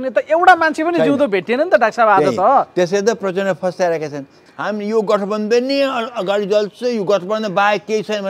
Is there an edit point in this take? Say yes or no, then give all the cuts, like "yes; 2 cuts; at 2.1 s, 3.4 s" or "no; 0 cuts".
yes; 1 cut; at 4.4 s